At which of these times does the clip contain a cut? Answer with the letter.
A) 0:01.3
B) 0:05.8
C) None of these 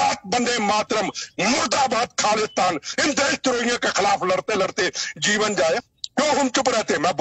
B